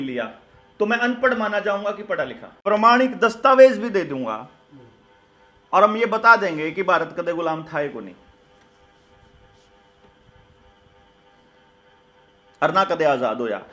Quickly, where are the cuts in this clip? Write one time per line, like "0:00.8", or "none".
0:02.5